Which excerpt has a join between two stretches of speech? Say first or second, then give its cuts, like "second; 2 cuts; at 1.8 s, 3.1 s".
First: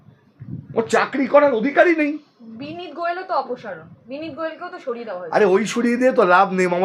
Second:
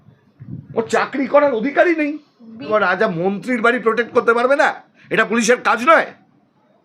second; 1 cut; at 2.7 s